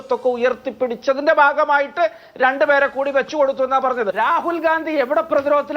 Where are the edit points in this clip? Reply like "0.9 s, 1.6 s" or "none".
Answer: 4.1 s